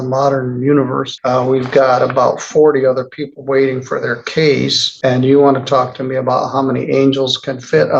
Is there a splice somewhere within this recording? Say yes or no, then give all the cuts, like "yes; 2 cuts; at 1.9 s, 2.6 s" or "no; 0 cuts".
yes; 2 cuts; at 1.1 s, 4.8 s